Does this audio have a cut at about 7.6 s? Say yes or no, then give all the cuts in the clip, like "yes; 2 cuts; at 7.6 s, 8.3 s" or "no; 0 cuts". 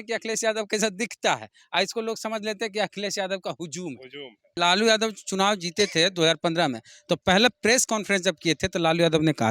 no; 1 cut; at 4.6 s